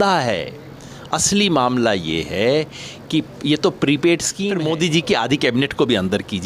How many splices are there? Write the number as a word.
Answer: one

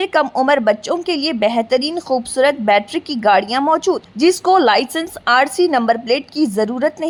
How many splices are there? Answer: zero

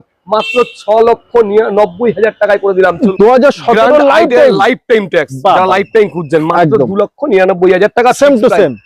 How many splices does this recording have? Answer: one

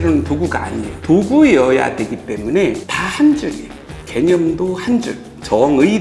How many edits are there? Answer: one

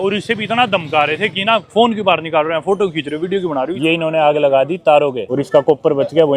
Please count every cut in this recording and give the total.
two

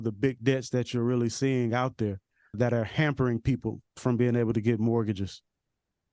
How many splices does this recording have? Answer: one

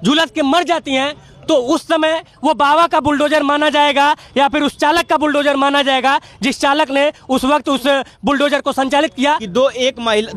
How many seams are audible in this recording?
one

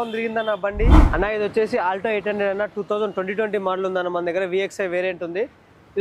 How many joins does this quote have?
one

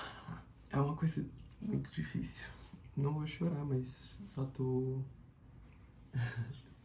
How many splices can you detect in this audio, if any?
zero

